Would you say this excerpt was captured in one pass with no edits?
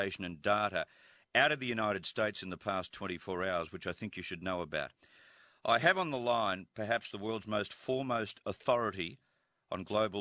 no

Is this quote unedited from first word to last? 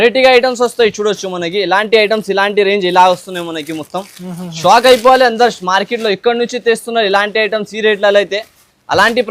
yes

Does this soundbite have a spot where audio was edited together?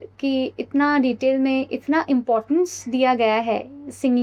no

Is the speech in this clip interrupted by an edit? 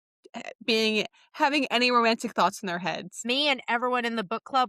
yes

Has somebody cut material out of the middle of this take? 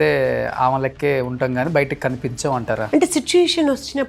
yes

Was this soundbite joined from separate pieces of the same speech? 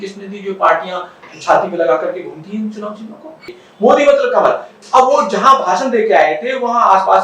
yes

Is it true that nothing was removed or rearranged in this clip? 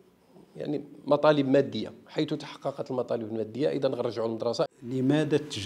no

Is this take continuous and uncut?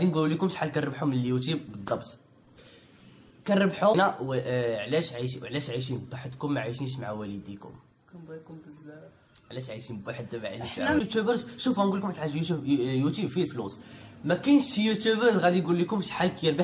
no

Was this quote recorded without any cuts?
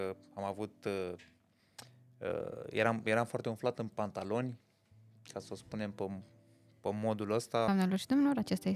no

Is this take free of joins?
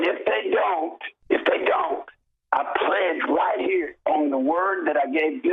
no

